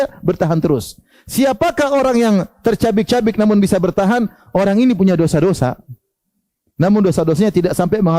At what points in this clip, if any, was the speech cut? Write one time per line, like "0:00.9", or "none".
none